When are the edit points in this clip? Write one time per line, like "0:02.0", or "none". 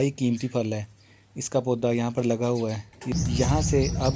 0:03.1